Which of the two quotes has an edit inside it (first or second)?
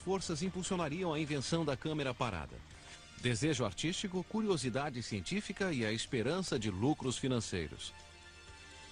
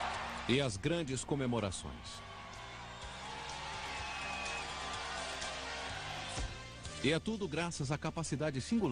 first